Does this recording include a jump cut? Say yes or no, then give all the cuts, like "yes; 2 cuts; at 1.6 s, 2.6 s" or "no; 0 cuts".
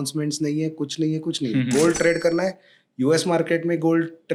no; 0 cuts